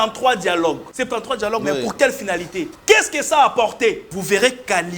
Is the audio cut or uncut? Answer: cut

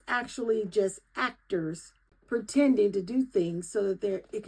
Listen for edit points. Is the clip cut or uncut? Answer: uncut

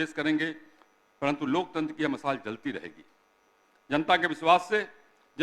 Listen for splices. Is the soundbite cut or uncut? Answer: uncut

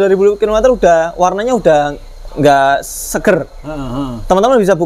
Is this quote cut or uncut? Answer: uncut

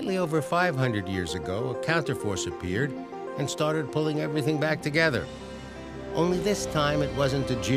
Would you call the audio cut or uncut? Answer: cut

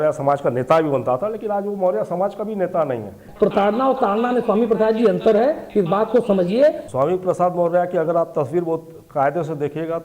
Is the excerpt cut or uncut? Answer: cut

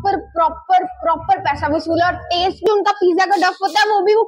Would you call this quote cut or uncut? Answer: cut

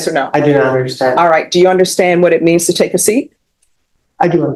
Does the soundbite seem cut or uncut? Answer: uncut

